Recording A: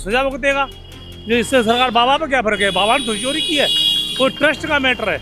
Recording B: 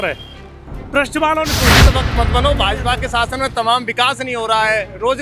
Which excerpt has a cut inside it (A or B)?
B